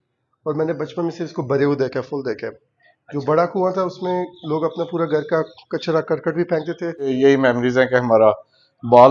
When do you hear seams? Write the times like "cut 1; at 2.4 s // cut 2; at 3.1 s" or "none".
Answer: cut 1; at 7.1 s